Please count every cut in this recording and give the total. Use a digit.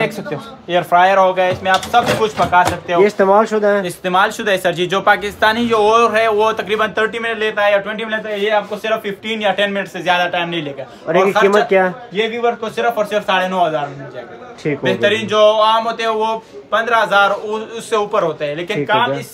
0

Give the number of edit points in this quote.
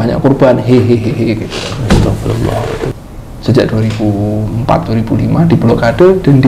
1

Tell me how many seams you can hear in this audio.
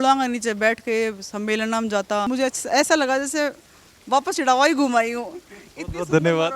1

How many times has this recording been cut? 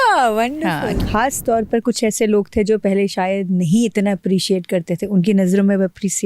1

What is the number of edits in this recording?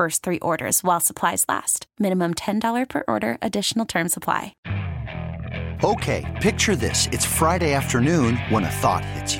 1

